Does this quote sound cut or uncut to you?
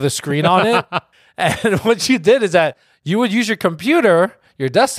cut